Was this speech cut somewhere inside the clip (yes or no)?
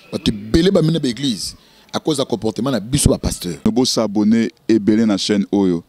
yes